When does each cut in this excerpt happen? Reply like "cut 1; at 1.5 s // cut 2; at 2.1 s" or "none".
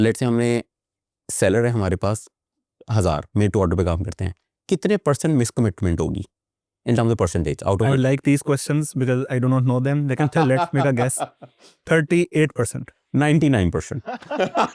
none